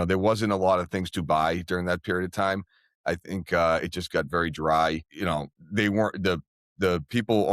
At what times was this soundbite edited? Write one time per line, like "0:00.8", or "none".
0:05.1